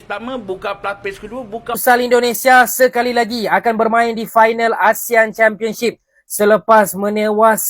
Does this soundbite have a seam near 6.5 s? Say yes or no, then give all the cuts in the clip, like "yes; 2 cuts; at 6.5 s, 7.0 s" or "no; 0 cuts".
no; 1 cut; at 1.8 s